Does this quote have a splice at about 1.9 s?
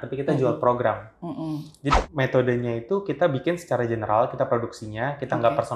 yes; 1 cut; at 1.9 s

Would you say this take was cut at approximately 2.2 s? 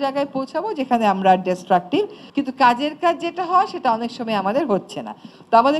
yes; 1 cut; at 2.2 s

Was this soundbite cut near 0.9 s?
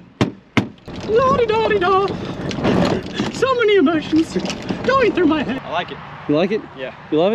yes; 2 cuts; at 0.9 s, 5.6 s

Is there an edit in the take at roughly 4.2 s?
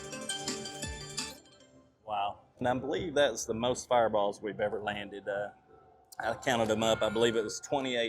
no; 1 cut; at 2.6 s

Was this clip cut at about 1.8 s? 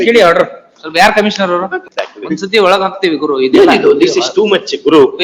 yes; 1 cut; at 1.8 s

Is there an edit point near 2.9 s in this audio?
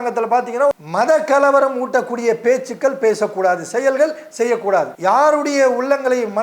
no; 2 cuts; at 0.8 s, 4.9 s

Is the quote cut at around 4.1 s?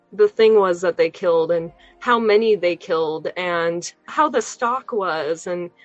yes; 1 cut; at 4.1 s

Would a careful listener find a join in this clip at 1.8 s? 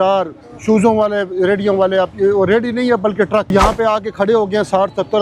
no; 1 cut; at 3.5 s

